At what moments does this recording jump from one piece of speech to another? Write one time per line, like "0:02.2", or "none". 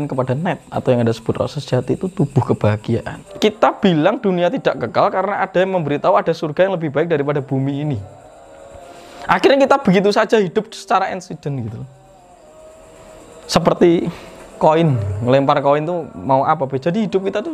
0:03.2